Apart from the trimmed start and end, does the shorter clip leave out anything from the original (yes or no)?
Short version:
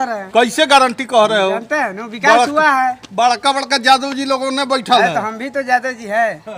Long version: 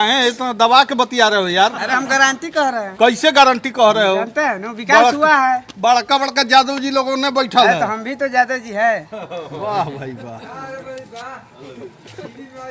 no